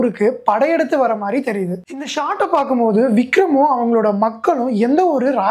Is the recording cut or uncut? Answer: cut